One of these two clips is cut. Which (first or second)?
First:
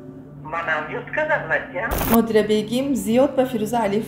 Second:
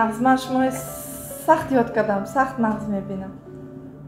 first